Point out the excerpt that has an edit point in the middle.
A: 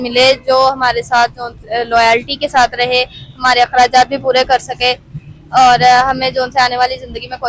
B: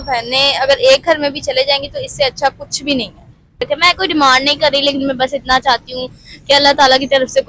B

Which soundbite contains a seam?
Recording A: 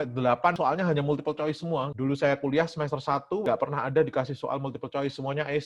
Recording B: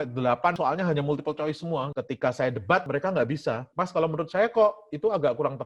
B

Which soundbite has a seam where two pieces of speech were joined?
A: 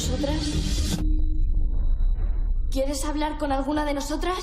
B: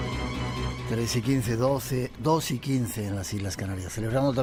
A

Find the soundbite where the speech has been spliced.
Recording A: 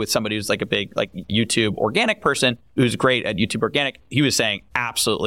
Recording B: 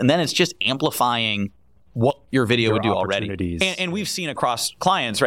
A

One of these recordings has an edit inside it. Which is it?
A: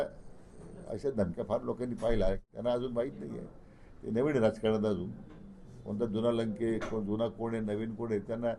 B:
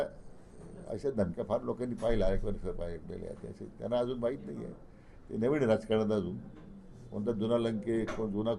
A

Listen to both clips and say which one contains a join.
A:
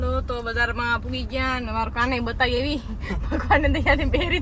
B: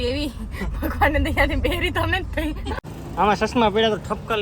B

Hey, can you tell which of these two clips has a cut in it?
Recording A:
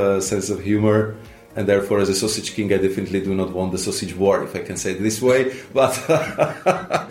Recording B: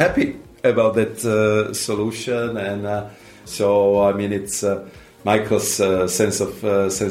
A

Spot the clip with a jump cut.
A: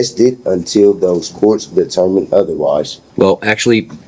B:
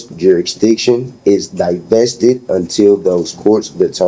A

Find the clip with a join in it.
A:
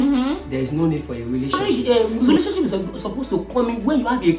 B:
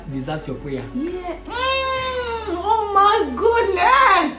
A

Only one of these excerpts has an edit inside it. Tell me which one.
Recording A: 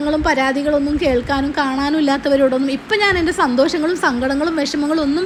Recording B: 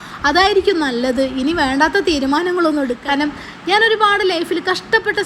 B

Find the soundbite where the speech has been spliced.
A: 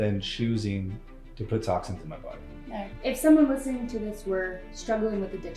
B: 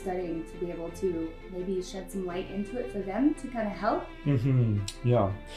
A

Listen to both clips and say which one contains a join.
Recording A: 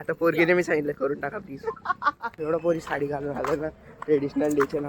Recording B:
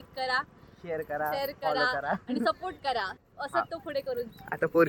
A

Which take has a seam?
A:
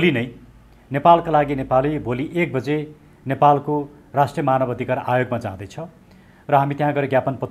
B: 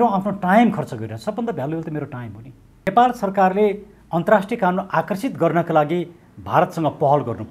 B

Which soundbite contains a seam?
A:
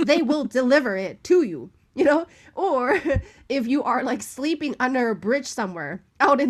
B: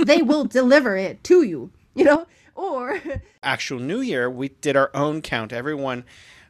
B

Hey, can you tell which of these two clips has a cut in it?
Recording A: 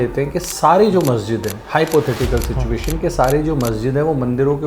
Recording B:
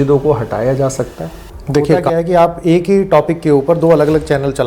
B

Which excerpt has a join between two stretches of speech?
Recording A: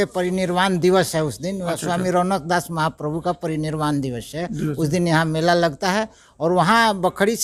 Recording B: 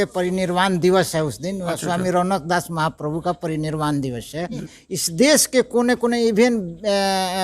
B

